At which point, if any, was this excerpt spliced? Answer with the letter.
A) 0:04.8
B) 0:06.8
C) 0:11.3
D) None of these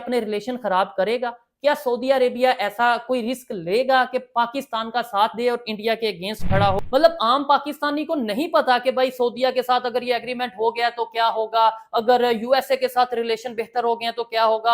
B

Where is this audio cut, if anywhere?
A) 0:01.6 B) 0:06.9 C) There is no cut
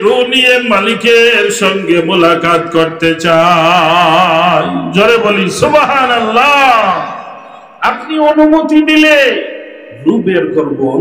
C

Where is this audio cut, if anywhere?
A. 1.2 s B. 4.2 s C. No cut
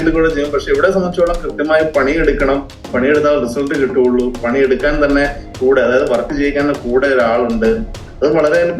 C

